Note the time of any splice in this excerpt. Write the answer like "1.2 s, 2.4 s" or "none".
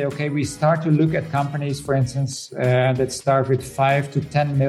none